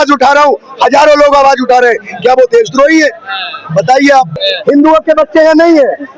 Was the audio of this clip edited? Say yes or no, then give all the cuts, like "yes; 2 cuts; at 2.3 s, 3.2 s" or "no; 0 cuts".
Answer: yes; 1 cut; at 4.4 s